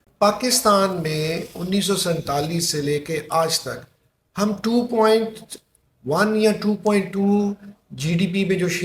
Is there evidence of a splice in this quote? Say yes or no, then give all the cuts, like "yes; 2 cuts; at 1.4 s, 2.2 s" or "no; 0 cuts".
no; 0 cuts